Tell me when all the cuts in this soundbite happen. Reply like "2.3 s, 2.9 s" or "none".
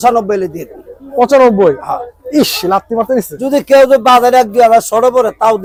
none